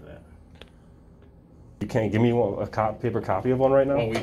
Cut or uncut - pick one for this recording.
cut